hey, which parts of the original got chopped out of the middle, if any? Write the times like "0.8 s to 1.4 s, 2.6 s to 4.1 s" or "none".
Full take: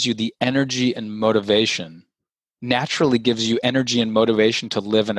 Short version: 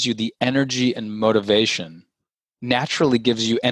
none